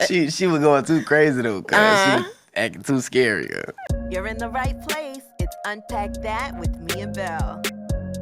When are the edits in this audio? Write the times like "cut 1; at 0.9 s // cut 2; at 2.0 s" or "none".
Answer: cut 1; at 3.9 s